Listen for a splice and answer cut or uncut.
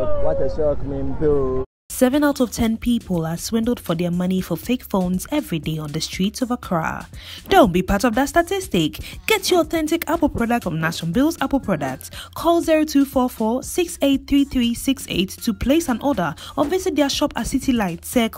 cut